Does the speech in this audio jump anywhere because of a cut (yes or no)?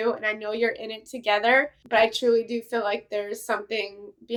no